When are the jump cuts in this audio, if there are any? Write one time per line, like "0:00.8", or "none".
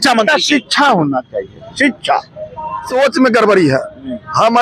0:02.9